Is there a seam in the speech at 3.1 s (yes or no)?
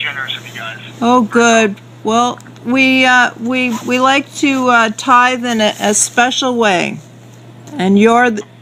no